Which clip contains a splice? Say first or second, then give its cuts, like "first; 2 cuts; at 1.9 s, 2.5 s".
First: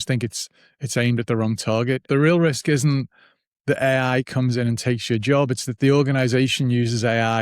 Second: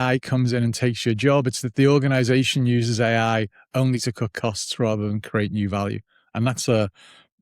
first; 1 cut; at 2.0 s